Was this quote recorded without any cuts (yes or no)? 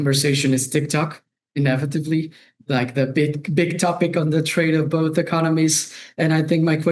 yes